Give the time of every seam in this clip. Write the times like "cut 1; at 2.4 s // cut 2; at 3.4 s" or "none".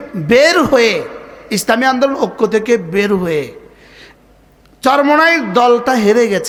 none